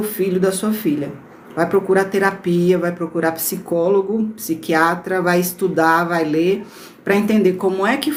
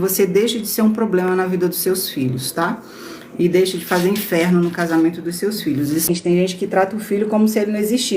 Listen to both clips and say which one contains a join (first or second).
second